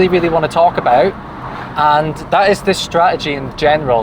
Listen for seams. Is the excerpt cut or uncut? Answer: uncut